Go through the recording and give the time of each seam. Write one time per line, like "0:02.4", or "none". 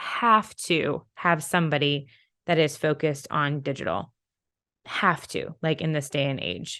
none